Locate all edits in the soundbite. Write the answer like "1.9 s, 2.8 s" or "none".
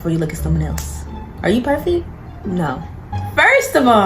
2.9 s